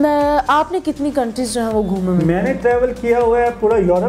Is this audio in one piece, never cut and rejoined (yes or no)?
yes